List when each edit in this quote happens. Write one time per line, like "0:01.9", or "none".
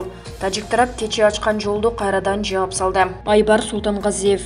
0:03.2